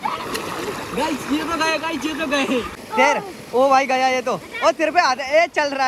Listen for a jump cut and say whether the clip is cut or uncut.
cut